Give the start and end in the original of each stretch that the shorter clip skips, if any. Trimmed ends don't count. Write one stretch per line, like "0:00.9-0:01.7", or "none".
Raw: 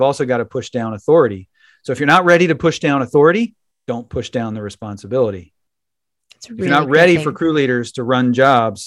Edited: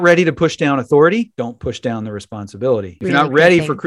0:03.5-0:03.8
0:05.4-0:06.5